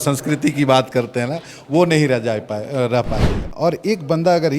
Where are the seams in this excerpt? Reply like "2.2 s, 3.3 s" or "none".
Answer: 3.4 s